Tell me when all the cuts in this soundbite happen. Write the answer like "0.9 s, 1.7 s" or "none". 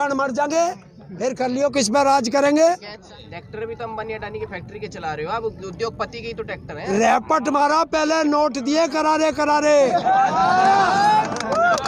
3.0 s